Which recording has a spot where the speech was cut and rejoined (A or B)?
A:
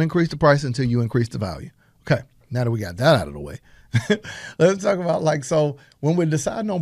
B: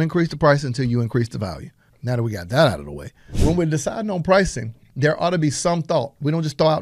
B